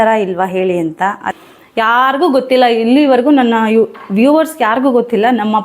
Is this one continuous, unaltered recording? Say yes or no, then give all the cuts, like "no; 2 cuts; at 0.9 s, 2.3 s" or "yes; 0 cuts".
no; 1 cut; at 1.3 s